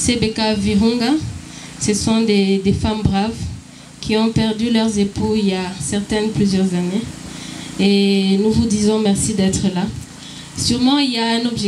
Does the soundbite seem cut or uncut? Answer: uncut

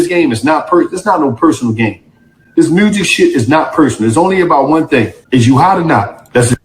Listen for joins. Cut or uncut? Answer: cut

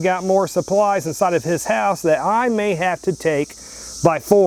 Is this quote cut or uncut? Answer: uncut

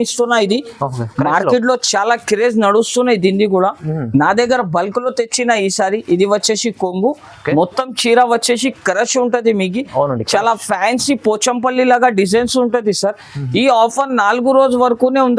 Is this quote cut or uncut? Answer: uncut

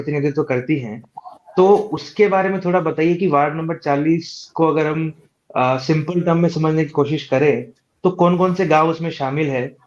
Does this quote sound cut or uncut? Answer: uncut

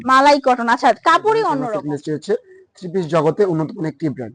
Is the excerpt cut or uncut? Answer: cut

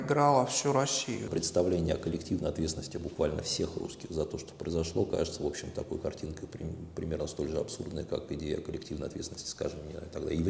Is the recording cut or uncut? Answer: cut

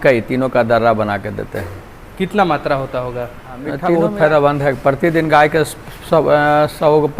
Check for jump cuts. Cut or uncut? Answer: cut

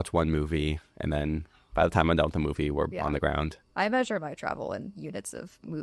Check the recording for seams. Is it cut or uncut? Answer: uncut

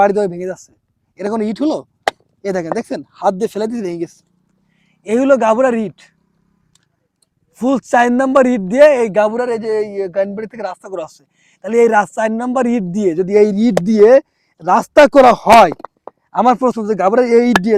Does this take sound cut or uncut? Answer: uncut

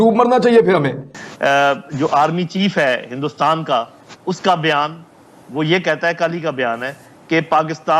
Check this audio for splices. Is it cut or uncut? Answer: cut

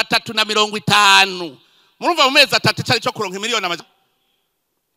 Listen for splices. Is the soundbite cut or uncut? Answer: cut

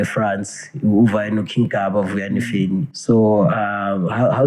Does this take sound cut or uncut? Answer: cut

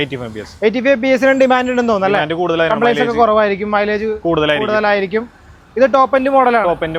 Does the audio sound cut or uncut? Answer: uncut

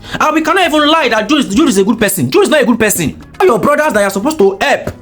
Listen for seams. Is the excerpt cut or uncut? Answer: cut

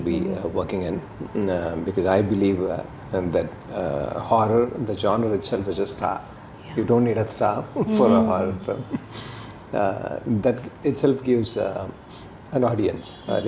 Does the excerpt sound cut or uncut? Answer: uncut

